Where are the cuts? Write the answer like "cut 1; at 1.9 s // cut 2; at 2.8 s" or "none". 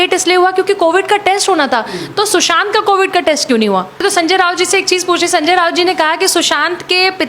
cut 1; at 4.0 s